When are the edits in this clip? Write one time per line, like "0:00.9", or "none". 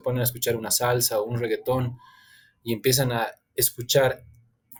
none